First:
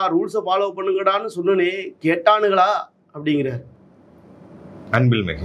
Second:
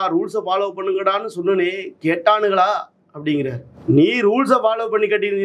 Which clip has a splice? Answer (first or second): second